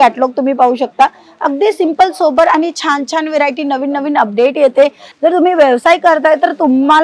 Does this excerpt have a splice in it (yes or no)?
yes